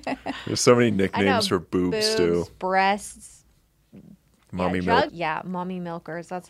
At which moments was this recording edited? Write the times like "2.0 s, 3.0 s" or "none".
5.1 s

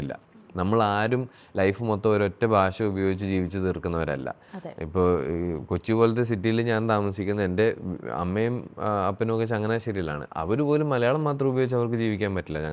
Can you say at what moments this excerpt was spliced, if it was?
none

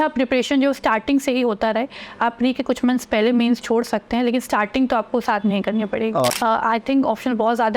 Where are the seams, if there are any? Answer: 6.2 s

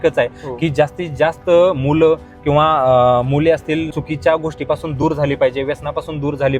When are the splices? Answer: 3.9 s

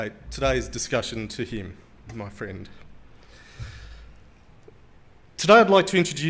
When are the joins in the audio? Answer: 5.1 s

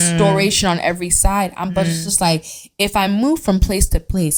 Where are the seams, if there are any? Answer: none

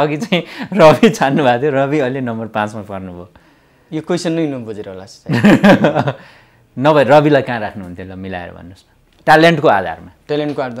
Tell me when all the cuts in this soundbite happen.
none

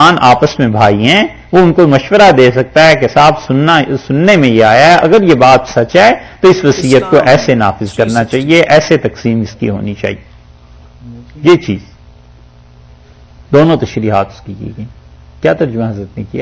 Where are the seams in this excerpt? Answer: none

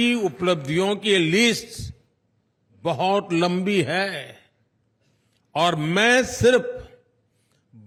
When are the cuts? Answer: none

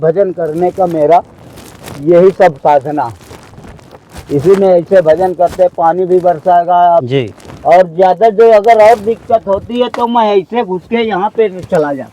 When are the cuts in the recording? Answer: 7.0 s

